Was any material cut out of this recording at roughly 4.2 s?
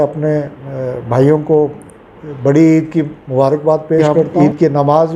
yes; 1 cut; at 4.2 s

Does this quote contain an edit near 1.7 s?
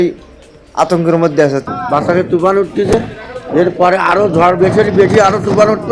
yes; 1 cut; at 1.7 s

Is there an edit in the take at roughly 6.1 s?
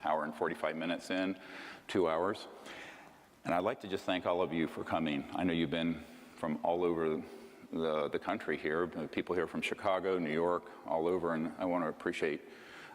yes; 1 cut; at 6.1 s

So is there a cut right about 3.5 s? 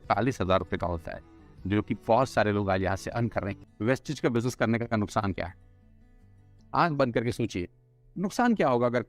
yes; 1 cut; at 3.5 s

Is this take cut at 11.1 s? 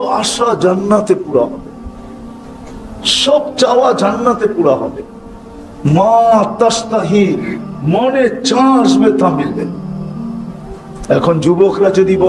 yes; 2 cuts; at 9.7 s, 11.1 s

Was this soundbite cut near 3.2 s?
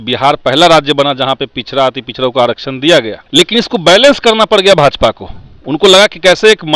yes; 1 cut; at 3.2 s

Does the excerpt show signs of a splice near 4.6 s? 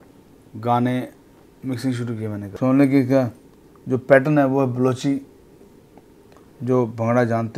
no; 1 cut; at 2.5 s

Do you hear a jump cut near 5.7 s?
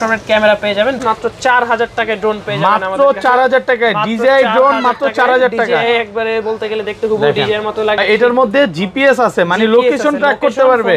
no; 2 cuts; at 1.0 s, 8.0 s

